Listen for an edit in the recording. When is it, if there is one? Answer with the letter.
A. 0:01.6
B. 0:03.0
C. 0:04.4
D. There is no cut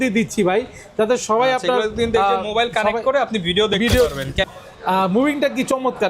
C